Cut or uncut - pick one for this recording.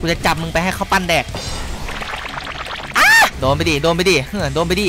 cut